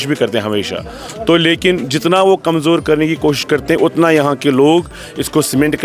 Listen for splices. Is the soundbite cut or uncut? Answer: uncut